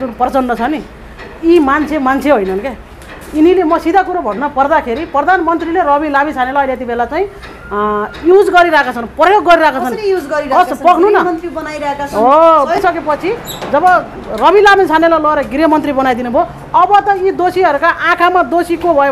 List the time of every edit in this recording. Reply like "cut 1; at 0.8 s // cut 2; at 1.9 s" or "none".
cut 1; at 12.8 s